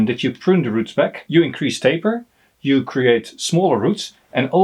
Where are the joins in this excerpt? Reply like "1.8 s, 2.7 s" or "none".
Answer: 1.2 s